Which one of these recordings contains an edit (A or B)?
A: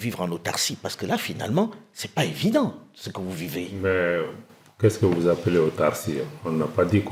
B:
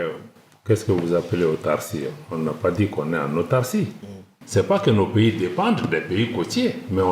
B